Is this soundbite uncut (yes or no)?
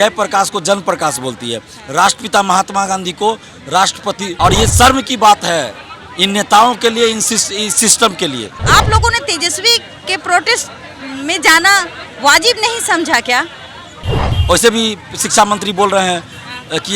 no